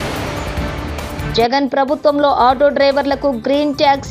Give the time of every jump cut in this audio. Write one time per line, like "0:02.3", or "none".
none